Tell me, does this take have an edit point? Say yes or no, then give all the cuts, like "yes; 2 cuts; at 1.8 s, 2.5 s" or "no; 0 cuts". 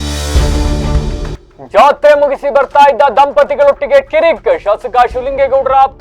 no; 0 cuts